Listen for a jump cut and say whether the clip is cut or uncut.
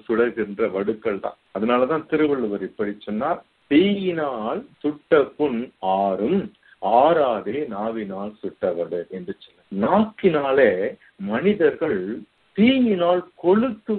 cut